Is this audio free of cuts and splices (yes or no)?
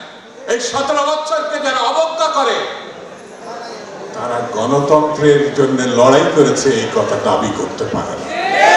yes